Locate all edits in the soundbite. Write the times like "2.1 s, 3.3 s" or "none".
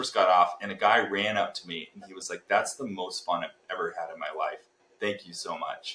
none